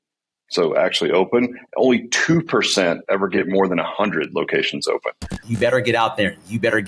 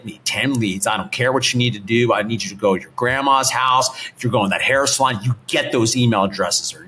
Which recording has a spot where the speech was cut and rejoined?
first; 1 cut; at 5.3 s

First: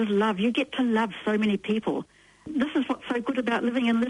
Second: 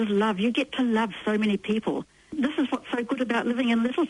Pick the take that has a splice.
second; 1 cut; at 2.2 s

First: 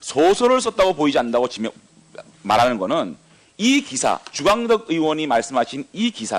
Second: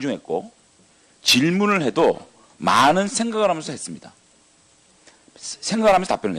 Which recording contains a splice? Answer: first; 1 cut; at 3.6 s

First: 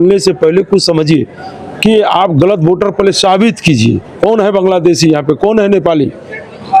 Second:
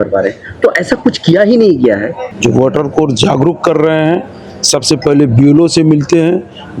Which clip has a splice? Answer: second; 1 cut; at 2.2 s

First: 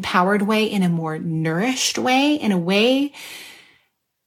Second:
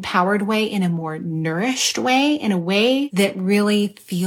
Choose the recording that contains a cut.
second; 1 cut; at 3.1 s

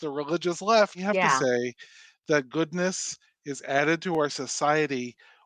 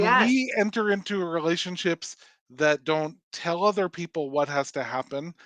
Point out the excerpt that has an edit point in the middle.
first; 1 cut; at 1.0 s

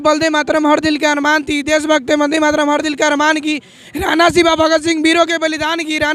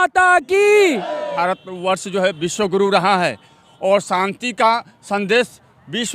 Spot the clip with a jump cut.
second; 1 cut; at 1.3 s

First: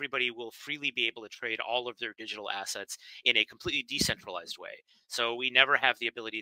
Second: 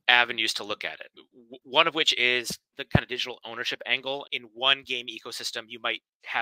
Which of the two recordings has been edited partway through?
second; 2 cuts; at 1.1 s, 4.3 s

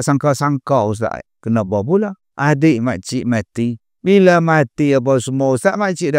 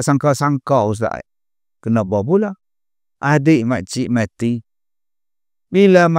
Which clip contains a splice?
first; 3 cuts; at 1.3 s, 2.2 s, 3.9 s

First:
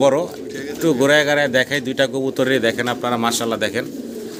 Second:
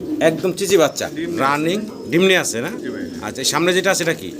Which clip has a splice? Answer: second; 1 cut; at 1.1 s

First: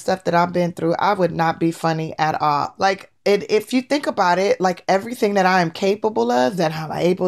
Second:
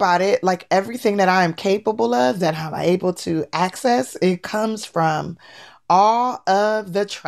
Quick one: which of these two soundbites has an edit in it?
first; 1 cut; at 2.7 s

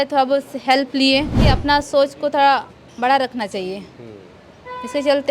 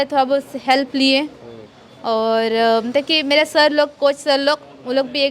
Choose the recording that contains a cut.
first; 1 cut; at 1.5 s

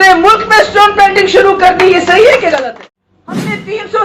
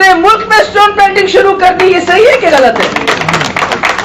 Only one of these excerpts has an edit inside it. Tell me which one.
first; 1 cut; at 2.5 s

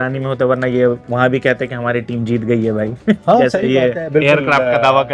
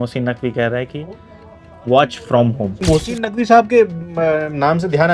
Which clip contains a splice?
second; 1 cut; at 2.8 s

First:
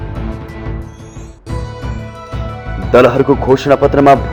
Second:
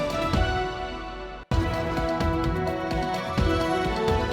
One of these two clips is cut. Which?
second; 1 cut; at 1.4 s

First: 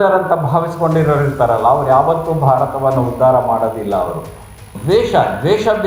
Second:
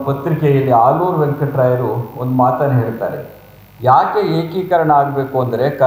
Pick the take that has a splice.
first; 1 cut; at 4.7 s

